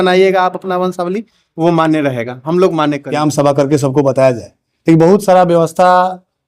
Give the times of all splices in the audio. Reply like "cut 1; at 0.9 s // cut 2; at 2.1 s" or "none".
cut 1; at 3.1 s